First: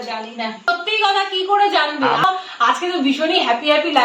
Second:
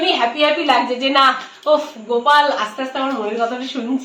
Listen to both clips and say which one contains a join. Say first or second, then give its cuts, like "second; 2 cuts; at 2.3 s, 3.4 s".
first; 2 cuts; at 0.7 s, 2.2 s